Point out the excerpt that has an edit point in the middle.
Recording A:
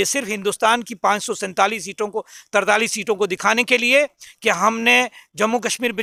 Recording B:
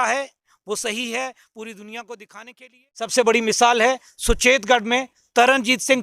B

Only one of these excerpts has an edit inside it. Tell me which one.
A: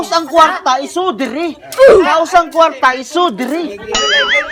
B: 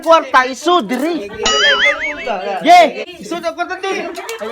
B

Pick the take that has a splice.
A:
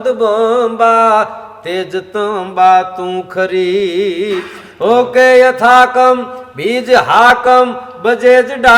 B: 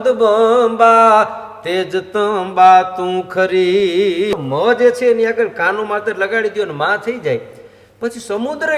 B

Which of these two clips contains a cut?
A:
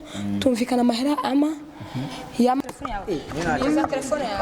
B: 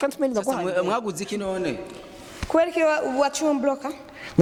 A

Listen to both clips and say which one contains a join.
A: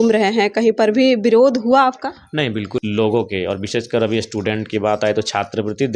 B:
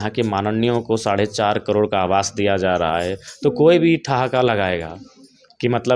A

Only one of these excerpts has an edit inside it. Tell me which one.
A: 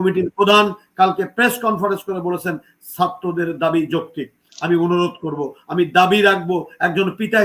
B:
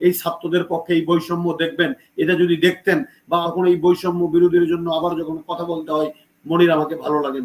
B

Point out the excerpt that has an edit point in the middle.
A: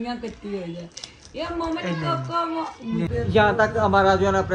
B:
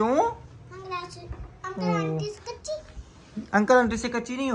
A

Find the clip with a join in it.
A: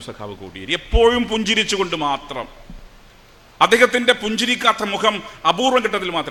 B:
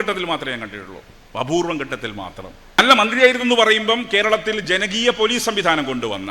B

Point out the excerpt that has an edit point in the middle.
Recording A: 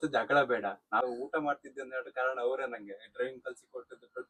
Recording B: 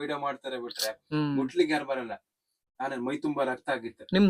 A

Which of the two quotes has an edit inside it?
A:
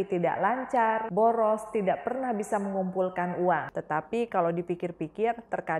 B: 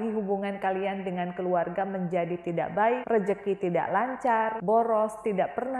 A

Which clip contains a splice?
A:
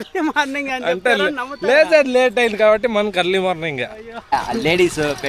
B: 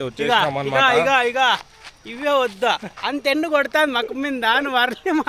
A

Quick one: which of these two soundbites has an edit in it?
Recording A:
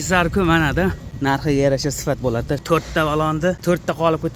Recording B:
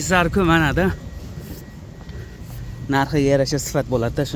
A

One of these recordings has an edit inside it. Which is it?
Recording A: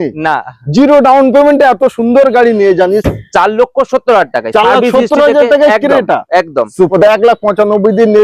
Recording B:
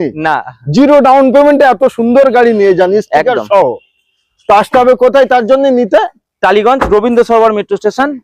A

